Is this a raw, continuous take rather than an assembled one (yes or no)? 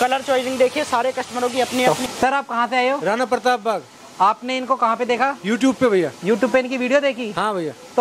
no